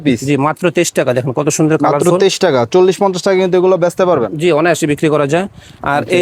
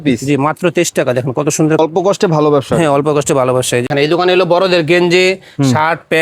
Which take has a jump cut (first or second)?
second